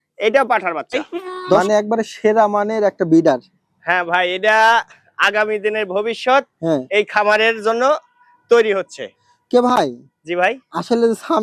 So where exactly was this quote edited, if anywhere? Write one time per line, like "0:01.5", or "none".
0:01.6